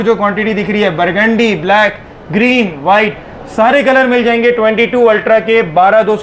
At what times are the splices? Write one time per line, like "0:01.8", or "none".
none